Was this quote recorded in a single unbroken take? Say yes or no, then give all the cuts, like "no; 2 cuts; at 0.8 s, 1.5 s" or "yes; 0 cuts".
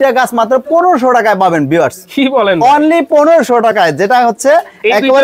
yes; 0 cuts